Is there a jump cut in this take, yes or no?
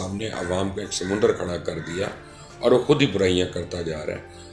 no